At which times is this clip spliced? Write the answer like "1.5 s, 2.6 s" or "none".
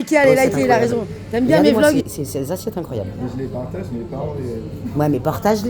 2.0 s